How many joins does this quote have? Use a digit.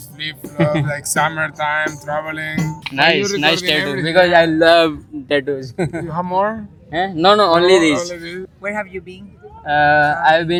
0